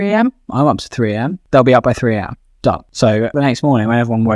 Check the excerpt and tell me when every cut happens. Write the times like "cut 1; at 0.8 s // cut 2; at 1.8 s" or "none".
cut 1; at 1.4 s // cut 2; at 3.3 s